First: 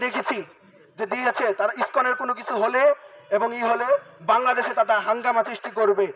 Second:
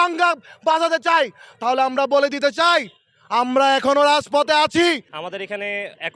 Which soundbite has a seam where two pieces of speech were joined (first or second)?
second